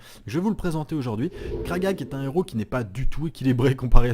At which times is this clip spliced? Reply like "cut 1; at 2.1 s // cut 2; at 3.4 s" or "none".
cut 1; at 1.4 s

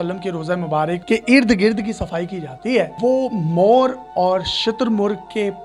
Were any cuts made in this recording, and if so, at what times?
cut 1; at 1.0 s // cut 2; at 2.9 s

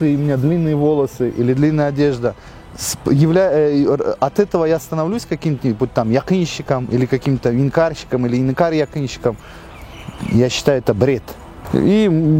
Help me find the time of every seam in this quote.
none

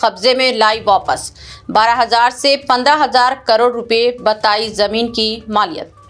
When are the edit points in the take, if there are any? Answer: none

